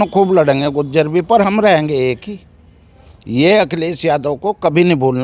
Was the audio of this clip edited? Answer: no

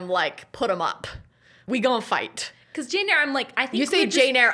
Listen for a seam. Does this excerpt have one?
yes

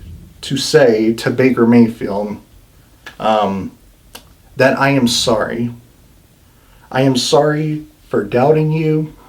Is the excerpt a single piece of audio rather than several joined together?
yes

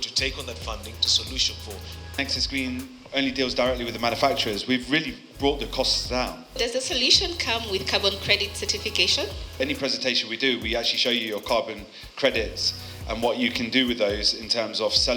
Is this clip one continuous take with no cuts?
no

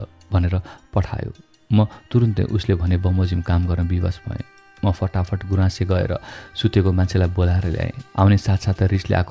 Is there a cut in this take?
no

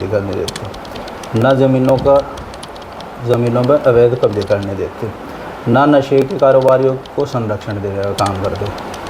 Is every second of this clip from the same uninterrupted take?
yes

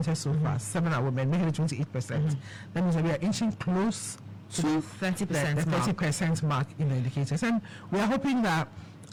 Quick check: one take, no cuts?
yes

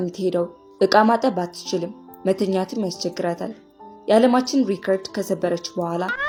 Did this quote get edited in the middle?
no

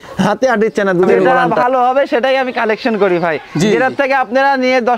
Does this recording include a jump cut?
yes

